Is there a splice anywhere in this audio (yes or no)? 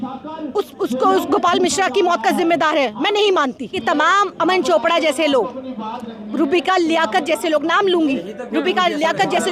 yes